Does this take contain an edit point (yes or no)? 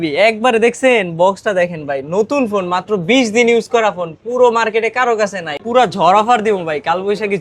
yes